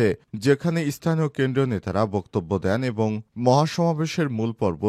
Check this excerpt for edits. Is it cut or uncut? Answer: uncut